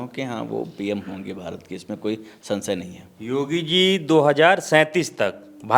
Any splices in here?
no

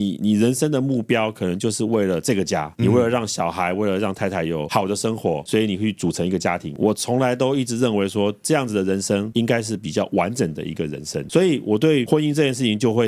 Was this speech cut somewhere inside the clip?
no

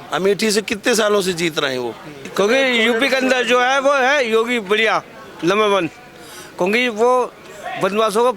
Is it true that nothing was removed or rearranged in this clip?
no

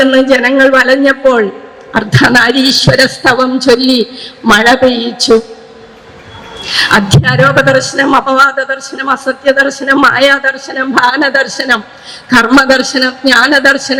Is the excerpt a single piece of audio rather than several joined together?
yes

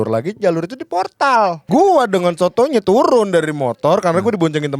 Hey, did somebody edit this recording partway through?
yes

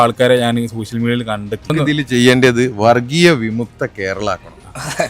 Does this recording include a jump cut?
yes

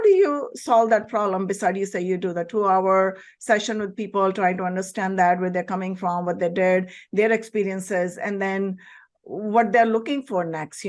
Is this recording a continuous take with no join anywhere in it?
yes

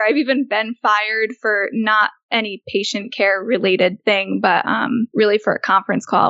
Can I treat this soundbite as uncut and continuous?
no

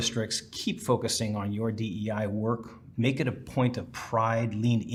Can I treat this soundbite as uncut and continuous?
yes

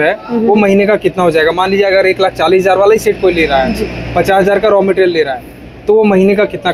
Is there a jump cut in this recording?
no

